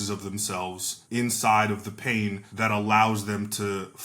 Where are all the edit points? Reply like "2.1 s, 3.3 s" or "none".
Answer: 0.9 s, 2.5 s